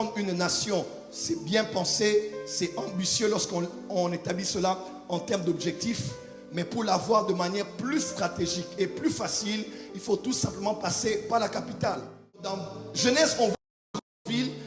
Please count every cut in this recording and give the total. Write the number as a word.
one